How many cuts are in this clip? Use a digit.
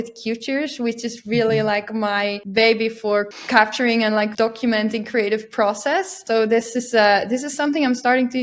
4